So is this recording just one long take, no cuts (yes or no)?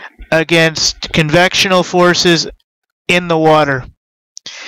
no